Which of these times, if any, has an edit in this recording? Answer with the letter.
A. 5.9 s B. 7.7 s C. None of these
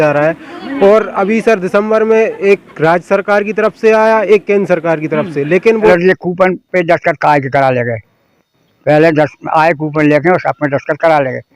A